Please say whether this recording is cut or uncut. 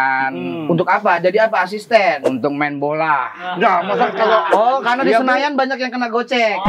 uncut